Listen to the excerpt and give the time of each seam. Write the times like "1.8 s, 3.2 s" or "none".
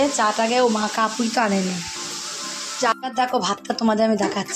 2.9 s